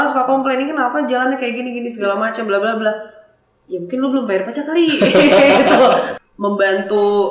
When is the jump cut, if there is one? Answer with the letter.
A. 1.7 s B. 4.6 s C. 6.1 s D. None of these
C